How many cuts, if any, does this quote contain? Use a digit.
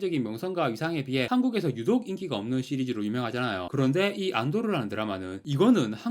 1